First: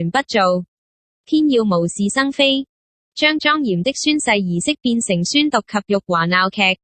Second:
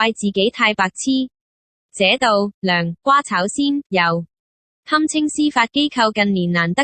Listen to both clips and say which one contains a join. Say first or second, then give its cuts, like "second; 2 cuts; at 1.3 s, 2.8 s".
first; 1 cut; at 4.8 s